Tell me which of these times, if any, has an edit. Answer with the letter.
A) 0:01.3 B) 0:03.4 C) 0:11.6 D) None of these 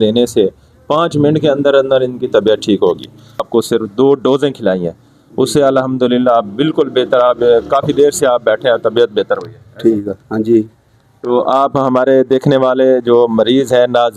B